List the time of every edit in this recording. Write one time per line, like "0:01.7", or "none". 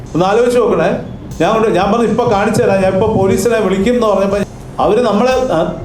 0:04.4